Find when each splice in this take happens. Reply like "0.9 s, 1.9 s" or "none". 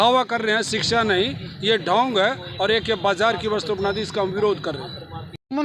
none